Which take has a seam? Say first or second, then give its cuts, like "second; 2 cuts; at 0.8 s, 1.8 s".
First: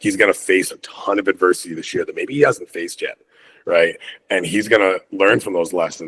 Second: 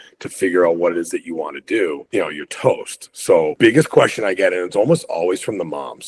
second; 2 cuts; at 2.0 s, 3.5 s